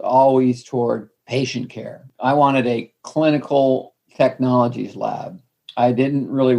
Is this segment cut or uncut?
cut